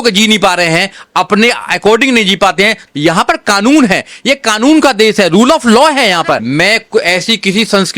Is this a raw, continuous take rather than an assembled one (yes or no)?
no